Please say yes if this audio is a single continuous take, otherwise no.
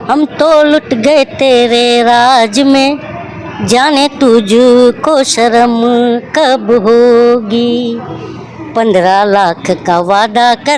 yes